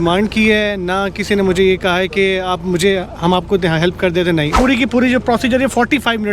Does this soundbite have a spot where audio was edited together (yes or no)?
yes